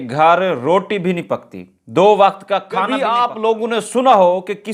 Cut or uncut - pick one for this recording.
cut